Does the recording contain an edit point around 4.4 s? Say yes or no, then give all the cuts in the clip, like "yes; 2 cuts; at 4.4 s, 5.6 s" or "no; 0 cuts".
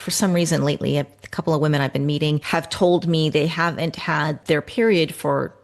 yes; 2 cuts; at 2.4 s, 4.4 s